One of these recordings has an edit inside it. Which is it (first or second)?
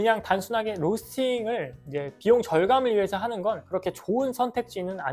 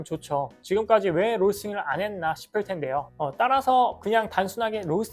second